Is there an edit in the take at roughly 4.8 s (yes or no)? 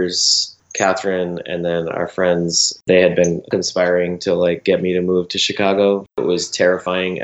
no